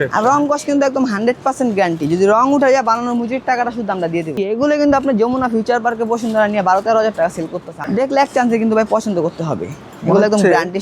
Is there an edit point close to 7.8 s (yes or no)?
yes